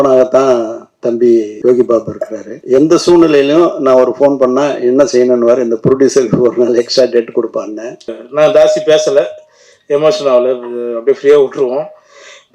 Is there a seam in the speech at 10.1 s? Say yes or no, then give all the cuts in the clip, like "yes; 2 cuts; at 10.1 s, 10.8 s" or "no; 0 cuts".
no; 3 cuts; at 1.5 s, 2.5 s, 8.2 s